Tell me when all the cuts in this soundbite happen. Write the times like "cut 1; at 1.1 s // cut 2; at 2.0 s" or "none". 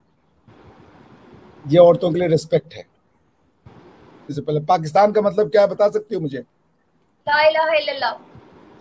cut 1; at 4.4 s